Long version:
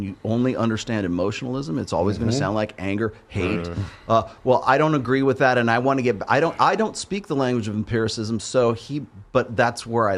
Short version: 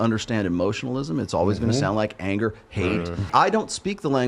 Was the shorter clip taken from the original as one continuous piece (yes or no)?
no